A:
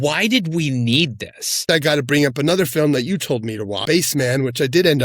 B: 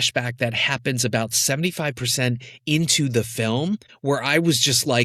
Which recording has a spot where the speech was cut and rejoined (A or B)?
A